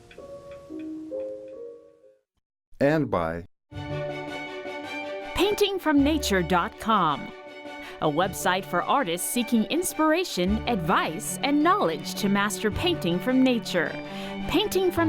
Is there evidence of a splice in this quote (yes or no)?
yes